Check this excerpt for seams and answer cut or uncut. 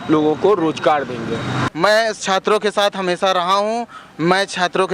cut